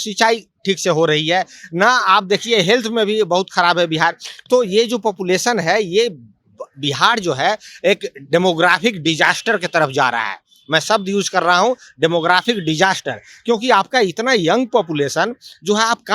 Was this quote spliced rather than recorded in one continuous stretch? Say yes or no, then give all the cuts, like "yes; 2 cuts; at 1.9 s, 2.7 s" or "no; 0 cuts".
no; 0 cuts